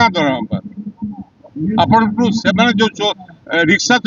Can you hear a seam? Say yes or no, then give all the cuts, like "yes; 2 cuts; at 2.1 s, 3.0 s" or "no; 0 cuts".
no; 0 cuts